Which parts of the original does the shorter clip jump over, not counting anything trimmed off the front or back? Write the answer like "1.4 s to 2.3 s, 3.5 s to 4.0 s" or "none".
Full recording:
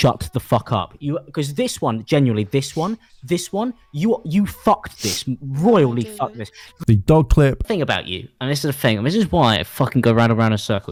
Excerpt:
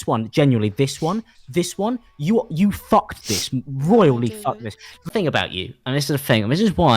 6.8 s to 7.6 s